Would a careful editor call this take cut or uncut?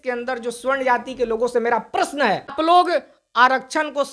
cut